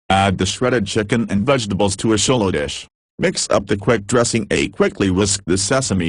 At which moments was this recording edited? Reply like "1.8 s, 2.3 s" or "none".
4.1 s